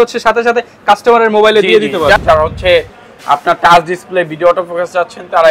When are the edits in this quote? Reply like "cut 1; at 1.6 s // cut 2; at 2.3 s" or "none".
cut 1; at 2.2 s

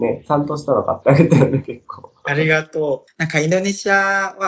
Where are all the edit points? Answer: cut 1; at 3.0 s

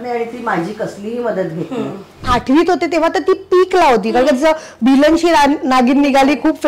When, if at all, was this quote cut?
cut 1; at 2.3 s

